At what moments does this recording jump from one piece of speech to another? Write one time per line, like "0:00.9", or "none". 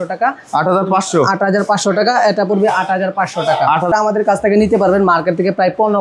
0:03.9